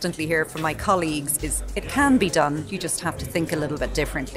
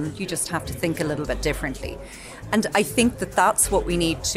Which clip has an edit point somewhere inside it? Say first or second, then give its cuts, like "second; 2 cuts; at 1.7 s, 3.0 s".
first; 1 cut; at 1.4 s